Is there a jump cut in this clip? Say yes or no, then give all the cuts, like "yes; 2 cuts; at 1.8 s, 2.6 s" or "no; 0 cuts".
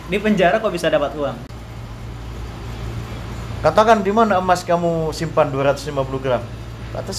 yes; 1 cut; at 1.5 s